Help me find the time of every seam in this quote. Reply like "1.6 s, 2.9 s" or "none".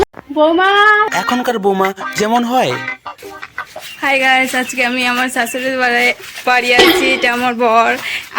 1.1 s